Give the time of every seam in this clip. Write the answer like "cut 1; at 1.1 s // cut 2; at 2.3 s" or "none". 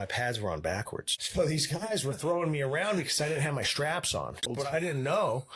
cut 1; at 1.2 s // cut 2; at 4.5 s